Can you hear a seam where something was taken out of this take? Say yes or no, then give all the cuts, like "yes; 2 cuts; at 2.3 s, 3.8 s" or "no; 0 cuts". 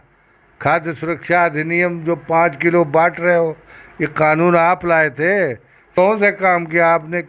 yes; 1 cut; at 5.9 s